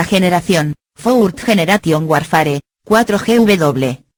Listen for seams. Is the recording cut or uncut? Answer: uncut